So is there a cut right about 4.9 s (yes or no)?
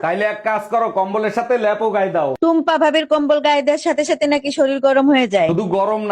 no